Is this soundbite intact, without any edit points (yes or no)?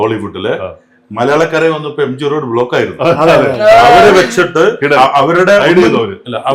yes